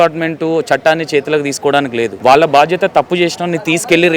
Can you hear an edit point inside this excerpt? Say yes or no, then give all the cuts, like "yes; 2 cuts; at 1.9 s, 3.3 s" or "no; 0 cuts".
yes; 1 cut; at 2.1 s